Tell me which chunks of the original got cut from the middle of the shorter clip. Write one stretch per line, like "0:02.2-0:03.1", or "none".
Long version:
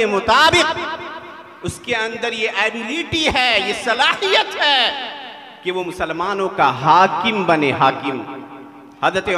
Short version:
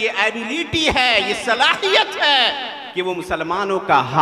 0:05.2-0:05.5